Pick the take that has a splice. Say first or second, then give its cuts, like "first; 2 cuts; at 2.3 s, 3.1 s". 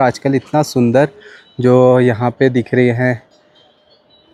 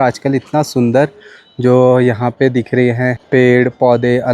second; 1 cut; at 3.2 s